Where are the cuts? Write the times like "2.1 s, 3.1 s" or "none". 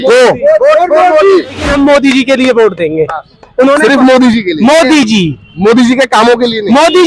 1.7 s